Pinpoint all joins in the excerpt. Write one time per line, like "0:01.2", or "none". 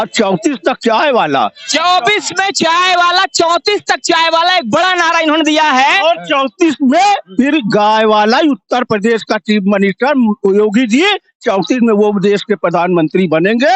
none